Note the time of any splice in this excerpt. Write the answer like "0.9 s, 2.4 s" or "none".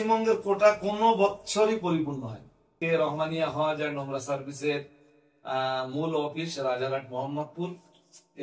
2.7 s